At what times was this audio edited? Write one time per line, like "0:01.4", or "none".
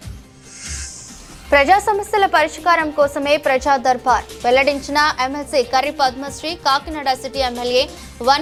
none